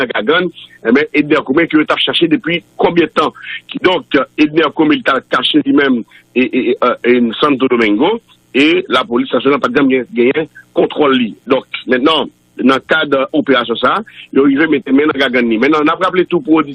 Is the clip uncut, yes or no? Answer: no